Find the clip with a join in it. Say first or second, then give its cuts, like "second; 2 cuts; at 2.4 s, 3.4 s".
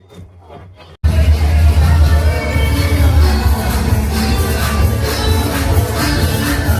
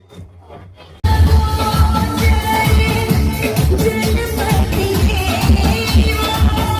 second; 1 cut; at 1.0 s